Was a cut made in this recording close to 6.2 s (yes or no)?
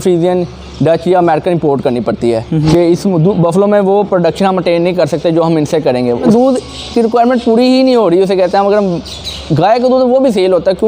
yes